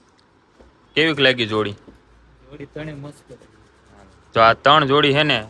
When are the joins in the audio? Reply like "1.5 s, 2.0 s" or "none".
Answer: none